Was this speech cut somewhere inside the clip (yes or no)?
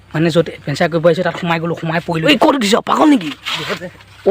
yes